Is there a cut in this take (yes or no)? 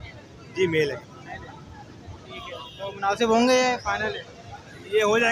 no